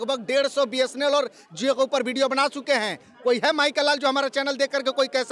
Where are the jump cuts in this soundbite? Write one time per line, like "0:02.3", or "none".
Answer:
none